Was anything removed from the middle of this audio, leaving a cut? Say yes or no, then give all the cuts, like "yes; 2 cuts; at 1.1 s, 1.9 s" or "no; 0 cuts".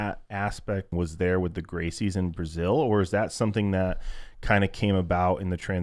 yes; 1 cut; at 0.9 s